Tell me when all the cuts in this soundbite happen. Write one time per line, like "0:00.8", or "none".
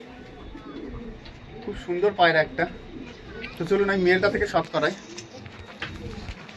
none